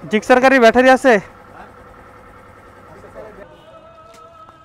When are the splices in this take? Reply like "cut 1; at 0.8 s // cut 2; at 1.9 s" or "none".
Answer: cut 1; at 3.4 s